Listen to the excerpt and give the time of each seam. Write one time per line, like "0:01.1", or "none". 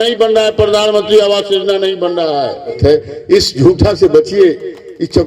0:02.8